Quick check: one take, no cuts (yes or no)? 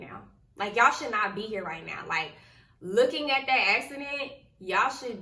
yes